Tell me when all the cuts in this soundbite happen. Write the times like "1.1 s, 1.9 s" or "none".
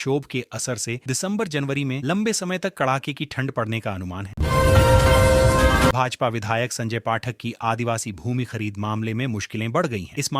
4.2 s, 5.9 s